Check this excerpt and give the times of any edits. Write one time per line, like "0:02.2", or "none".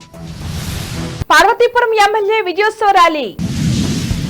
0:01.0